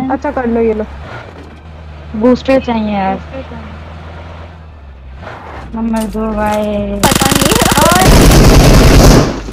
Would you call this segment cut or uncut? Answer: uncut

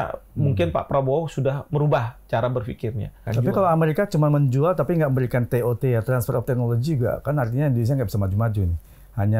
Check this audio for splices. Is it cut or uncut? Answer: cut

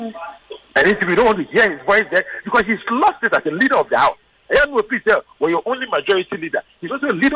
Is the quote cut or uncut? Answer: uncut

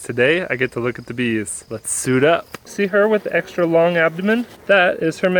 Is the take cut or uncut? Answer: cut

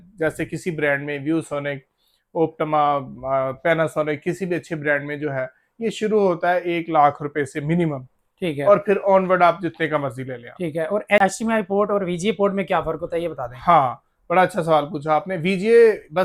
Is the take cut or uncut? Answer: uncut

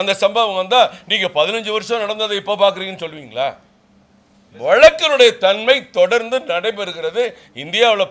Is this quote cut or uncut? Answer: uncut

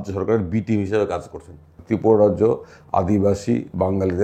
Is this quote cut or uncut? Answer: cut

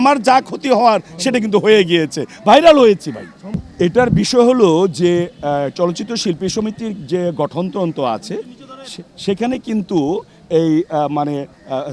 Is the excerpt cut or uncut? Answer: uncut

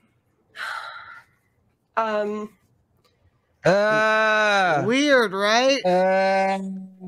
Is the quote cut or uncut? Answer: uncut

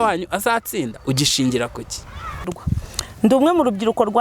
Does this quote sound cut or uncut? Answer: cut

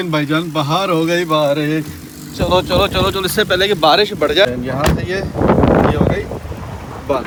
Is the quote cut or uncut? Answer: uncut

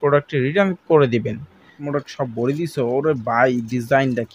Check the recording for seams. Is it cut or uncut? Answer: cut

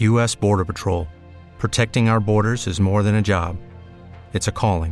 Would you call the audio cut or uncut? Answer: uncut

